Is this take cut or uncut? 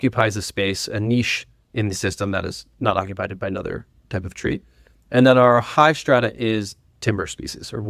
uncut